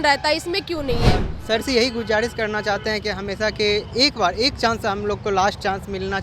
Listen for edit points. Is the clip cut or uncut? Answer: cut